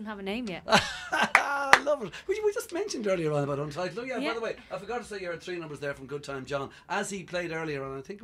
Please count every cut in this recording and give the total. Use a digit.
1